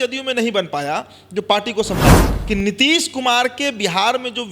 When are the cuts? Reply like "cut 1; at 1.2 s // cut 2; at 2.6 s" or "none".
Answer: cut 1; at 2.3 s